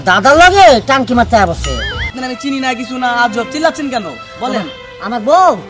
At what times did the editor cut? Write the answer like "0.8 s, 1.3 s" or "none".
2.1 s